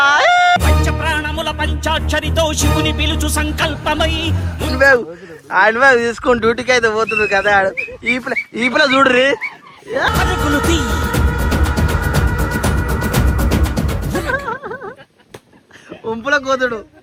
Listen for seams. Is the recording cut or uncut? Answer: uncut